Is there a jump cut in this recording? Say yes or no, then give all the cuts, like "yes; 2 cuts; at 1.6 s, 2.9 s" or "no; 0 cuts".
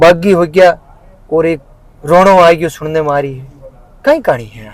no; 0 cuts